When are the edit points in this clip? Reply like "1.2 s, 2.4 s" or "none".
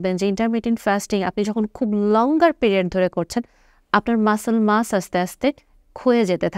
none